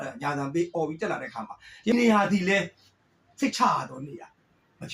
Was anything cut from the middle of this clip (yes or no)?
yes